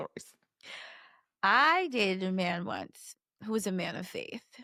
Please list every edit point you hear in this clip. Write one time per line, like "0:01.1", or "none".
none